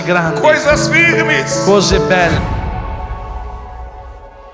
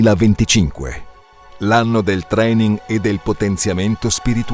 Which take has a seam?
first; 1 cut; at 2.4 s

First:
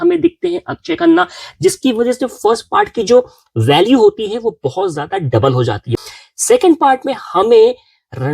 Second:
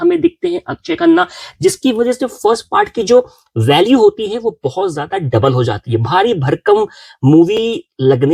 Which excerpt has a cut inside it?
first; 1 cut; at 6.0 s

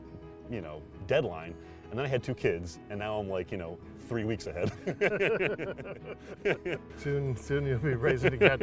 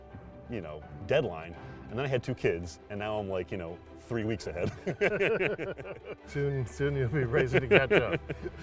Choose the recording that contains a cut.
second; 1 cut; at 6.2 s

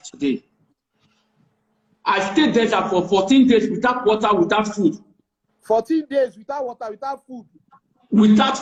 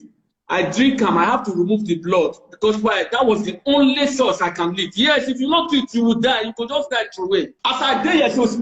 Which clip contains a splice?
second; 1 cut; at 7.5 s

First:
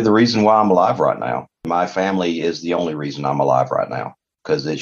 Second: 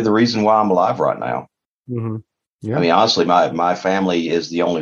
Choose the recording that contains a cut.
first; 1 cut; at 1.6 s

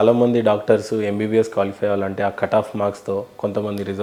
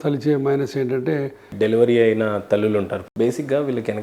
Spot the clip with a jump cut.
second; 2 cuts; at 1.4 s, 3.0 s

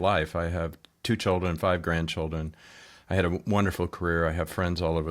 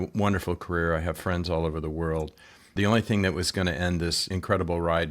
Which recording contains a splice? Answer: second; 2 cuts; at 2.7 s, 4.3 s

